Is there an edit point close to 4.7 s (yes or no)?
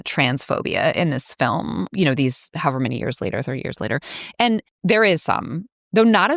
yes